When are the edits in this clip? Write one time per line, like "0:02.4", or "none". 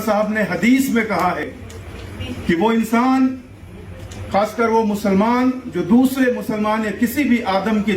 0:01.5